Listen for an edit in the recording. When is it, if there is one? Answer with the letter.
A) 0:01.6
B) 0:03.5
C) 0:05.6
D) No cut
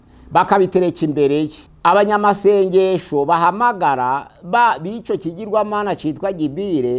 A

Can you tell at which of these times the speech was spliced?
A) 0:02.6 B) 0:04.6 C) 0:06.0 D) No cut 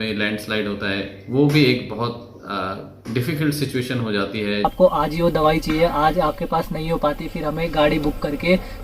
B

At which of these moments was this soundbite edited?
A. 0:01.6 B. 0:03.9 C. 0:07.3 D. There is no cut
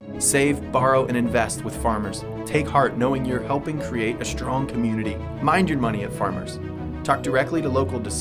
D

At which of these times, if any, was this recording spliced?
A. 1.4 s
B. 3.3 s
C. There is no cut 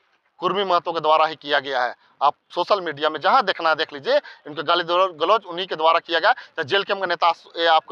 C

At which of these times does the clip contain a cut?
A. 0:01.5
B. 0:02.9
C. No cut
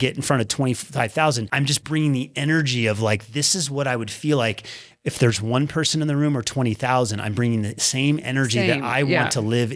A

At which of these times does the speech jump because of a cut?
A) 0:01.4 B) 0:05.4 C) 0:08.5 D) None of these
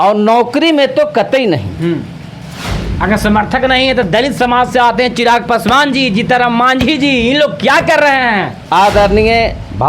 C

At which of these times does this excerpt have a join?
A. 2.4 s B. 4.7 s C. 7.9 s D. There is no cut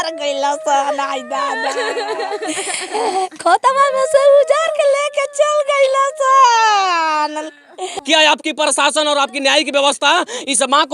C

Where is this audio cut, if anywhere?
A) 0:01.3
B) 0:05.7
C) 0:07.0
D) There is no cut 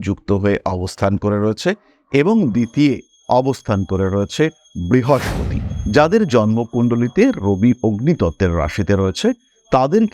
B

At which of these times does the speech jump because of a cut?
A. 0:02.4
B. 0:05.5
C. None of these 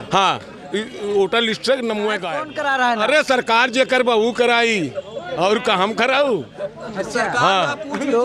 A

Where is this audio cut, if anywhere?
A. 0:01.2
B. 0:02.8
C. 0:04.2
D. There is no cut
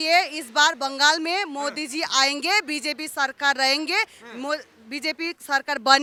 D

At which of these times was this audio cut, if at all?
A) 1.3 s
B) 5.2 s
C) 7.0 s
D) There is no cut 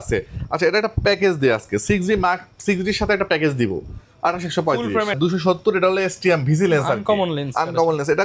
B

